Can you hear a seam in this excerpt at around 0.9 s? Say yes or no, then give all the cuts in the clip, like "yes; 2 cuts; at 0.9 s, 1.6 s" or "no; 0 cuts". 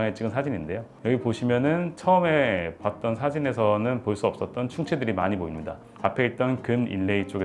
no; 0 cuts